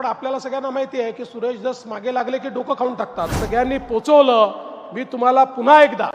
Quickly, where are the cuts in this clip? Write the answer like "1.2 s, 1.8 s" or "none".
3.4 s